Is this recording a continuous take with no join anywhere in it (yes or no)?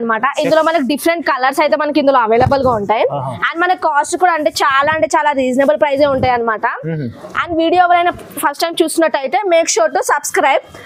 yes